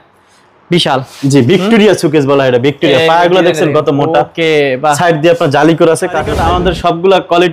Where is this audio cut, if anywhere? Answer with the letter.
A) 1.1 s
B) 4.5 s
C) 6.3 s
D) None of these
C